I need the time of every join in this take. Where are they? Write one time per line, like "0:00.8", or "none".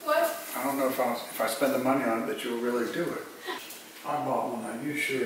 0:03.5